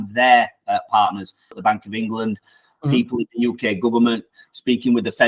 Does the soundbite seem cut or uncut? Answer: cut